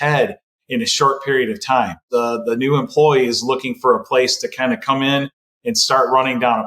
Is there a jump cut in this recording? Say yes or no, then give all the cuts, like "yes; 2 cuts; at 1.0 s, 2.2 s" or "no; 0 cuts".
yes; 1 cut; at 2.0 s